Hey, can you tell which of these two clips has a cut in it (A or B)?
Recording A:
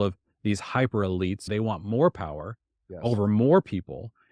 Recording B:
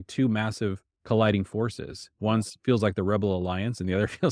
A